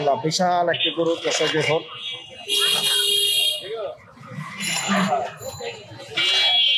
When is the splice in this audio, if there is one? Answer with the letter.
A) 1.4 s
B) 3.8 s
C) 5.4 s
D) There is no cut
D